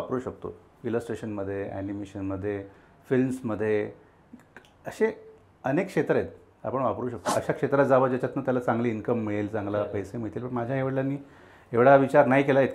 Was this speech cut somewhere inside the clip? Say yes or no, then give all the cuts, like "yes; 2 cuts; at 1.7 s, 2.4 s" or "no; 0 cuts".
yes; 1 cut; at 7.2 s